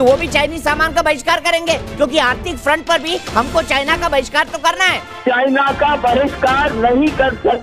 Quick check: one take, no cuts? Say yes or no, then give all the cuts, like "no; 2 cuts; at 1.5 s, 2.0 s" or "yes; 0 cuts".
no; 1 cut; at 5.1 s